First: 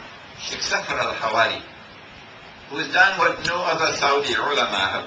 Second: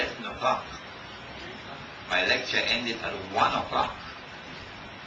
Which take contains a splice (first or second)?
first